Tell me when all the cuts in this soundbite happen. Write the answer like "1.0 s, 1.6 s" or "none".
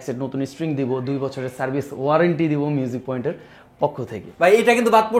4.2 s